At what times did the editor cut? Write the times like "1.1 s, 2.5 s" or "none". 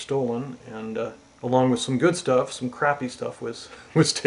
2.3 s